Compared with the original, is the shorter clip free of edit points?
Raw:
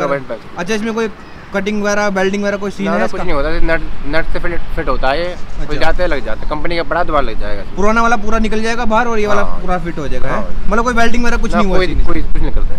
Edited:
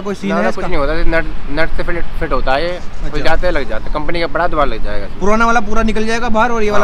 yes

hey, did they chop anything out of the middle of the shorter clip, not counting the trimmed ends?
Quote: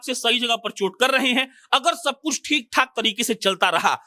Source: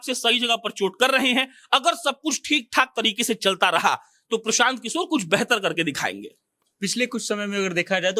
no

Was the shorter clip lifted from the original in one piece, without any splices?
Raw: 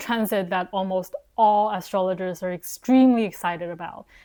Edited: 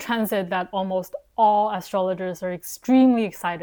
yes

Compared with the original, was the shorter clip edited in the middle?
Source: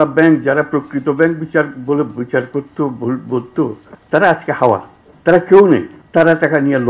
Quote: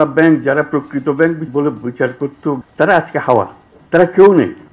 yes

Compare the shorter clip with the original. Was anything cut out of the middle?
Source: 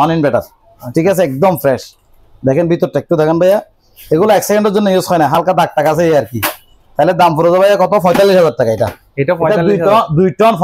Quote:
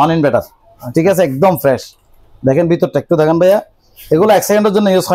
no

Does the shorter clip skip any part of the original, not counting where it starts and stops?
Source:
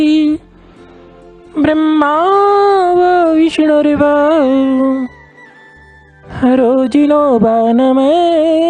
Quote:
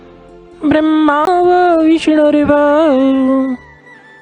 yes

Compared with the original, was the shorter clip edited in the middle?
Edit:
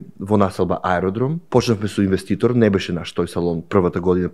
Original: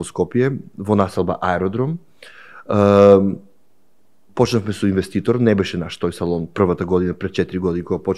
yes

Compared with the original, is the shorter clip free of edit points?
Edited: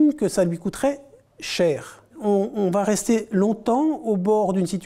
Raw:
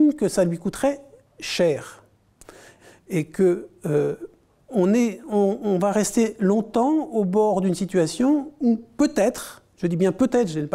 no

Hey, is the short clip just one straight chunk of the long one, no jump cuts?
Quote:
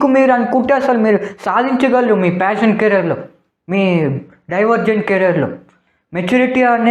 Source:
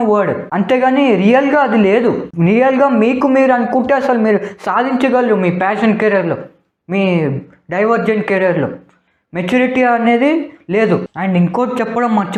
yes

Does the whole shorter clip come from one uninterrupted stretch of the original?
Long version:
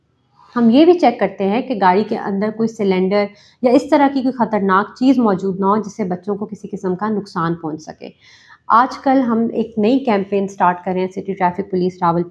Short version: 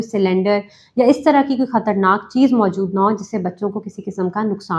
yes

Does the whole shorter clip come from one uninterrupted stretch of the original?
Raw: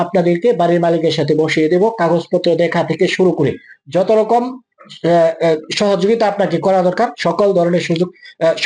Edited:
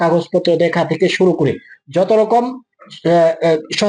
yes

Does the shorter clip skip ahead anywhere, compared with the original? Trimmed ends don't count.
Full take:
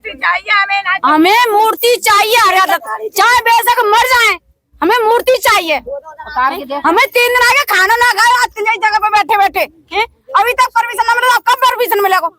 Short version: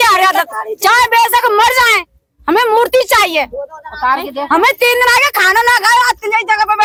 no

